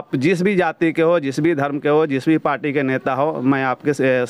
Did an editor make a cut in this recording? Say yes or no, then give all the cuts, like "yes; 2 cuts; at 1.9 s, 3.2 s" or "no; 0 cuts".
no; 0 cuts